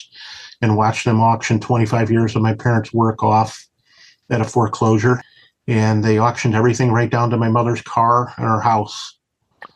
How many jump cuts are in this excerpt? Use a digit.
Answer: 1